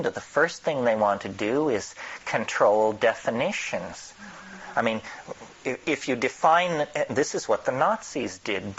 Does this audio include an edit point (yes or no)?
no